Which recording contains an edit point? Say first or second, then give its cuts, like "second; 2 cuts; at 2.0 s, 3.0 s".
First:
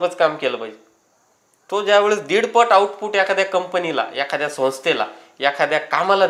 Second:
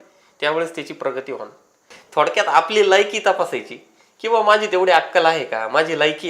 second; 1 cut; at 1.8 s